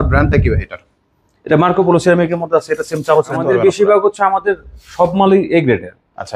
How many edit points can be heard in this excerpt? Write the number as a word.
one